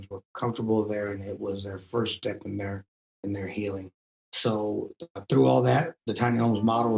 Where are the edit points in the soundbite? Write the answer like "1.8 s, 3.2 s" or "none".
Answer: 4.2 s